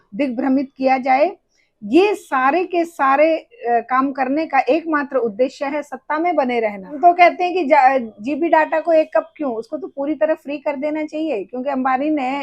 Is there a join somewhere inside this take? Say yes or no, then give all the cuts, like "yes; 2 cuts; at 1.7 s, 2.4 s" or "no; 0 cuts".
yes; 1 cut; at 6.9 s